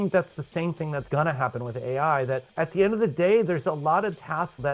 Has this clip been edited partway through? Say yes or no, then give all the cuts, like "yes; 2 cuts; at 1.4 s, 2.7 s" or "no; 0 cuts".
yes; 1 cut; at 2.5 s